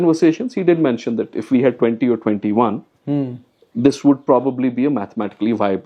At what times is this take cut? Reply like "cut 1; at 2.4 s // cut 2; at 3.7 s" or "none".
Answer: none